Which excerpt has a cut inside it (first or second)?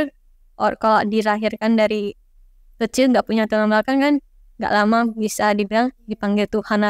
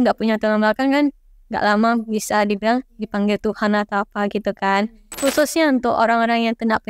second